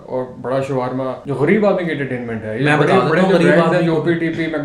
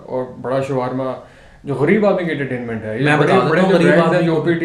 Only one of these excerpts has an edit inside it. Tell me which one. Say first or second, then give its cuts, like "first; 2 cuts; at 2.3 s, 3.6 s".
first; 1 cut; at 1.2 s